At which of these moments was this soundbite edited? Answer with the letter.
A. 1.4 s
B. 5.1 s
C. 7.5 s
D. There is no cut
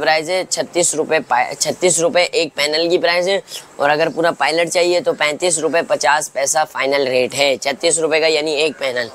D